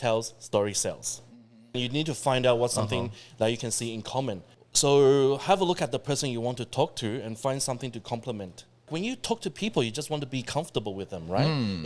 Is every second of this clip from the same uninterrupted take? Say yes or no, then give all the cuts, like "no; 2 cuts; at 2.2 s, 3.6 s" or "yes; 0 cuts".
no; 3 cuts; at 1.4 s, 4.5 s, 8.9 s